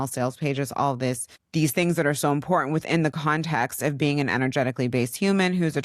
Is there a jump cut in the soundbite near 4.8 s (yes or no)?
no